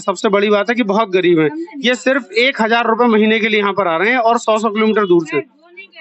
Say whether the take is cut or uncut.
uncut